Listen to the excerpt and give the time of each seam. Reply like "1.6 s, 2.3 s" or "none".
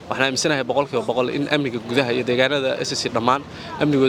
none